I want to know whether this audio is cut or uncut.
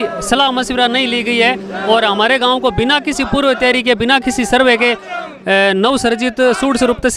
uncut